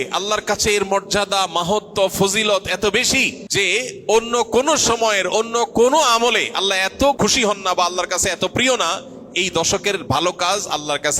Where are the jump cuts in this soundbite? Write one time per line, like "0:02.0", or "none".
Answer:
0:03.4
0:07.2

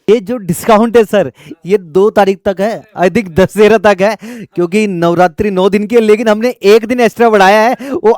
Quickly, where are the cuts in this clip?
none

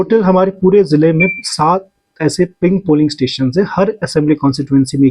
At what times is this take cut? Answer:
none

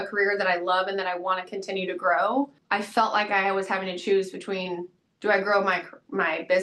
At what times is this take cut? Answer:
0:02.6

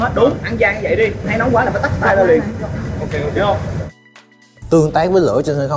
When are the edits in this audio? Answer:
0:04.5

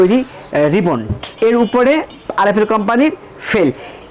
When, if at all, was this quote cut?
0:01.3
0:02.1

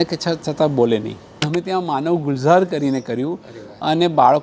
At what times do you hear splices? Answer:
0:01.5

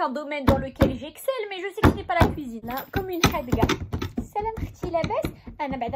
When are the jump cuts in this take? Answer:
0:02.6

